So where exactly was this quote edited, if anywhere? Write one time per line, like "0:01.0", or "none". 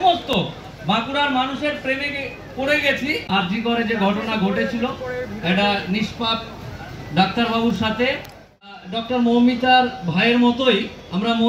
0:03.2
0:08.6